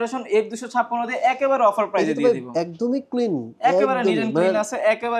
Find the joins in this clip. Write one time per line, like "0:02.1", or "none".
none